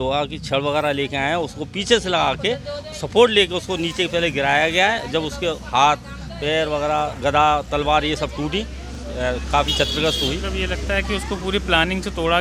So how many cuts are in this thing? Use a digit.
0